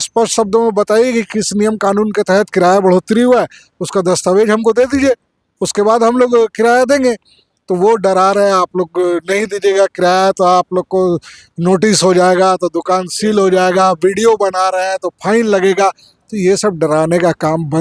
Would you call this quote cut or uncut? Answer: uncut